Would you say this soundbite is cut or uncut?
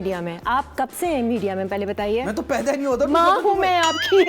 uncut